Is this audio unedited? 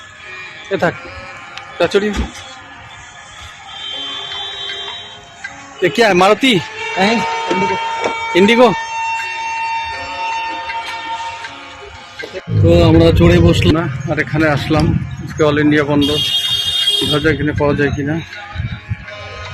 no; 1 cut; at 13.7 s

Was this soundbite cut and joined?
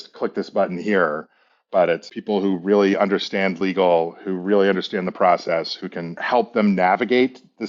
yes; 2 cuts; at 2.0 s, 6.2 s

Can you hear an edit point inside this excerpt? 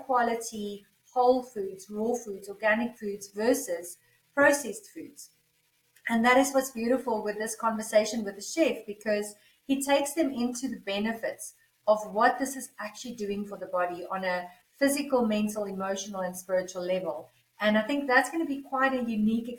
no; 0 cuts

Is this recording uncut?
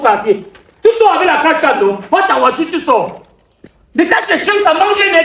yes; 0 cuts

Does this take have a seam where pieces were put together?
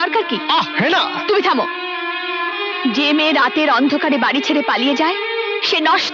no; 0 cuts

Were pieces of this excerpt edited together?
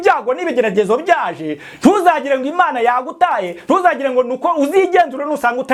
no; 0 cuts

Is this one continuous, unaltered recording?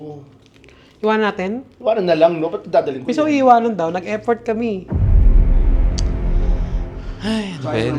yes; 0 cuts

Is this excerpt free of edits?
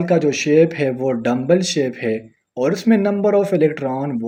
yes; 0 cuts

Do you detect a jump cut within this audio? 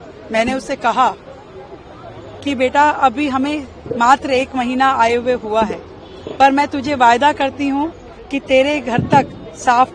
no; 0 cuts

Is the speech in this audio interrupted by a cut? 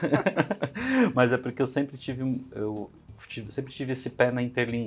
no; 0 cuts

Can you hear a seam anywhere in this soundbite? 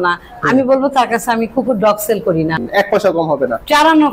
yes; 1 cut; at 2.7 s

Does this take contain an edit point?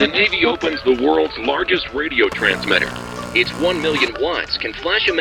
no; 0 cuts

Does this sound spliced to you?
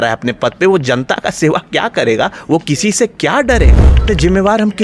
yes; 1 cut; at 3.9 s

